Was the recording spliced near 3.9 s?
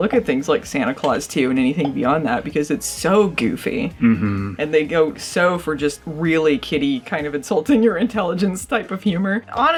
no; 0 cuts

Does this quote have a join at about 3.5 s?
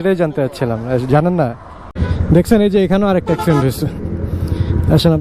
no; 1 cut; at 1.9 s

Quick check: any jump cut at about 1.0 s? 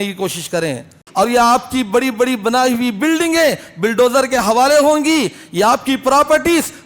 yes; 1 cut; at 1.0 s

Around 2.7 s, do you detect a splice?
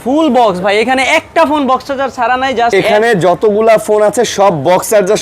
yes; 1 cut; at 2.7 s

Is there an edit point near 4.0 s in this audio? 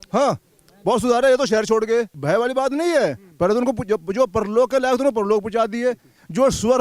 no; 1 cut; at 2.1 s

